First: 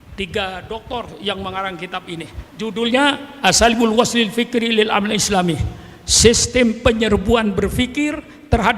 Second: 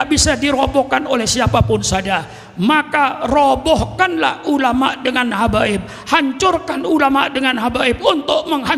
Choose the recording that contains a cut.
first; 1 cut; at 2.4 s

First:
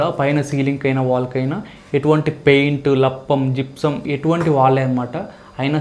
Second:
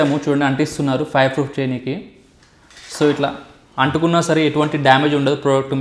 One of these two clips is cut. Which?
first; 1 cut; at 4.1 s

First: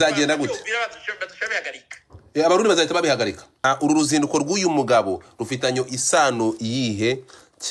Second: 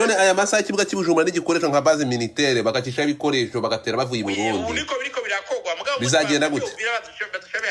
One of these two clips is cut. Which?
first; 1 cut; at 3.5 s

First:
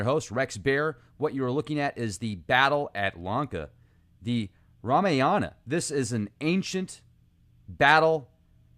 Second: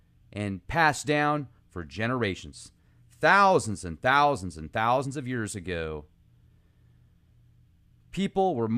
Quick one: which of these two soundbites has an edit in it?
first; 1 cut; at 6.4 s

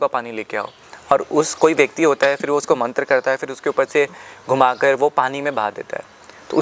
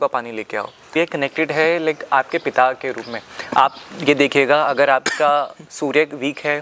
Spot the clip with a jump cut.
second; 1 cut; at 1.0 s

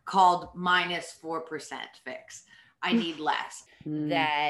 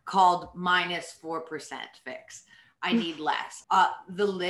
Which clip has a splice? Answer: first; 1 cut; at 3.5 s

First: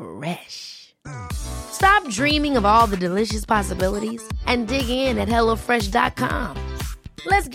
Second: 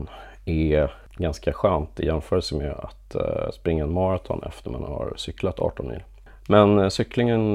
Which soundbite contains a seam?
second; 2 cuts; at 1.0 s, 6.1 s

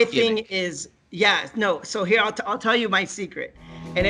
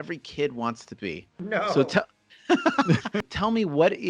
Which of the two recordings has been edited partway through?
second; 1 cut; at 3.2 s

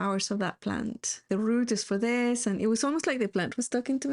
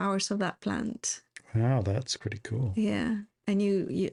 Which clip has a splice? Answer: first; 1 cut; at 1.2 s

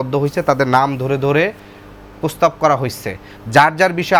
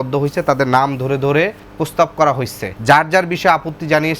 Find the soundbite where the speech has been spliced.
second; 2 cuts; at 1.6 s, 2.6 s

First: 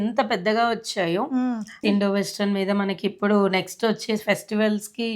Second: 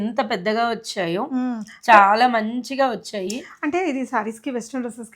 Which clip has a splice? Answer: first; 1 cut; at 1.8 s

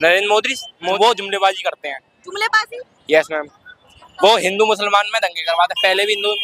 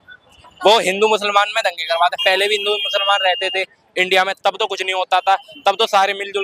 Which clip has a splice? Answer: first; 1 cut; at 0.9 s

